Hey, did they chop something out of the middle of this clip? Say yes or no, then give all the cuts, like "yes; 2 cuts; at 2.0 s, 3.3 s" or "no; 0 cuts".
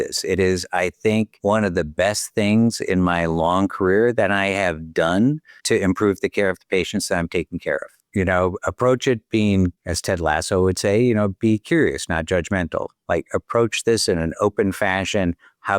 yes; 1 cut; at 9.9 s